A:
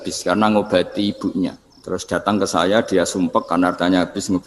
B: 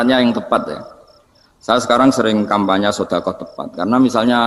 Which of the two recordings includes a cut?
A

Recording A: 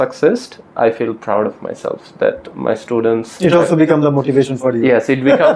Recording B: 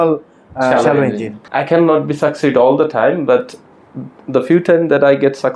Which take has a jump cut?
B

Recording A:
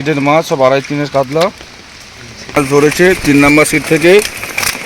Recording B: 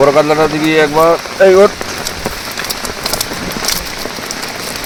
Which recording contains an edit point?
A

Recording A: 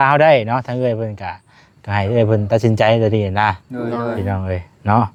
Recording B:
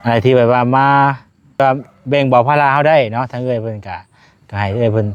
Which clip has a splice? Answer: B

